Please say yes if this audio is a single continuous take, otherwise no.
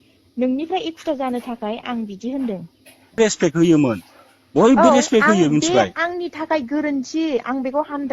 no